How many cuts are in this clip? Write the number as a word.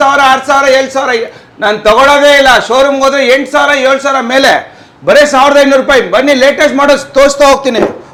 zero